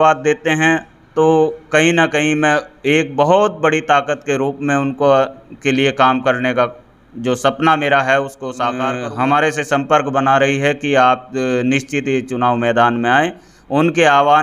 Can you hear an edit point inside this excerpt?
yes; 1 cut; at 8.9 s

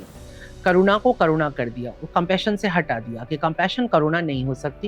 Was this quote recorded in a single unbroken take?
yes; 0 cuts

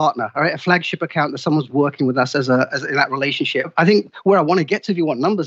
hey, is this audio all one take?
no; 1 cut; at 3.7 s

